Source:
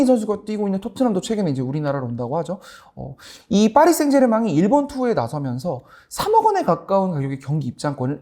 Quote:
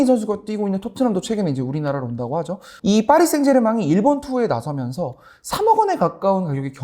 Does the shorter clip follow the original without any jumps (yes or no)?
no